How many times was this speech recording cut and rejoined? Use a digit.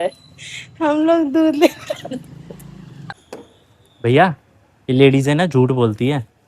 1